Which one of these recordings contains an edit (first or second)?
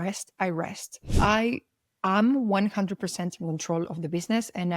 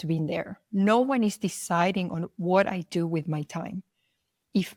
first